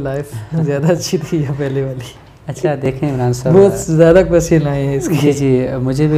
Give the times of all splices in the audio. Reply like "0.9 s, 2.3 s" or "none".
none